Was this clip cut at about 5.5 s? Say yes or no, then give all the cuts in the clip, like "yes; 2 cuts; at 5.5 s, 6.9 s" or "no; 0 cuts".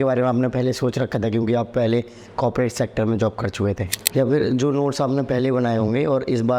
no; 1 cut; at 3.9 s